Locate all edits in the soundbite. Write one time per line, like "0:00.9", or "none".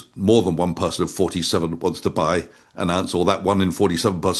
none